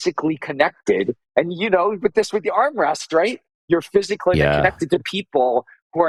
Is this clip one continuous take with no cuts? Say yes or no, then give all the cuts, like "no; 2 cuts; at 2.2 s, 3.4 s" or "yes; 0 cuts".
yes; 0 cuts